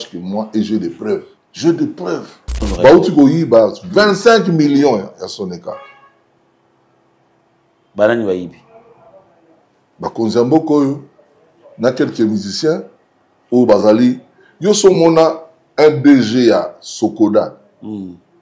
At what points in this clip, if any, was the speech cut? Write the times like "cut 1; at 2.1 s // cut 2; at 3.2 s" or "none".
cut 1; at 1.4 s // cut 2; at 2.7 s